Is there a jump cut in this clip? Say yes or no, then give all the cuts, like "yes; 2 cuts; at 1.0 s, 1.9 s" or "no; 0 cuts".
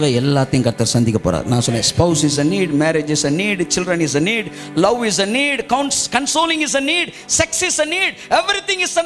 no; 0 cuts